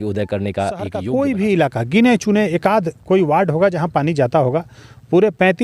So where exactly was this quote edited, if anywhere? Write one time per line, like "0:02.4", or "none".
0:01.0